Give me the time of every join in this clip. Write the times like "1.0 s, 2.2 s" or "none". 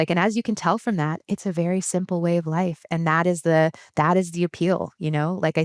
none